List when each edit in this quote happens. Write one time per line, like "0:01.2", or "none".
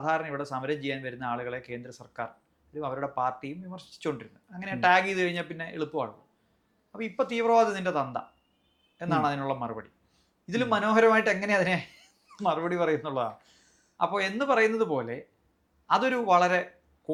none